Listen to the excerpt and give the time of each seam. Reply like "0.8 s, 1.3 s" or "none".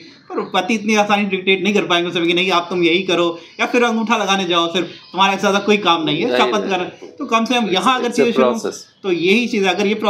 none